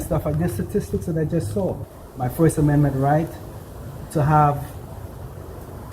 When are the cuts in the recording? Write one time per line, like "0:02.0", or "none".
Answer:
0:01.9